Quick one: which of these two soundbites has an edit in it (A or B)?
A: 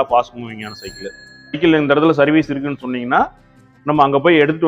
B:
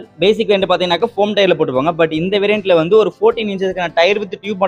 A